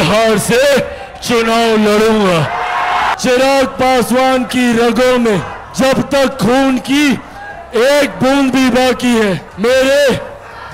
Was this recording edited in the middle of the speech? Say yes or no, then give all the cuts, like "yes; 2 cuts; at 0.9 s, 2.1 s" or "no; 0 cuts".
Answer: yes; 3 cuts; at 3.1 s, 5.6 s, 9.5 s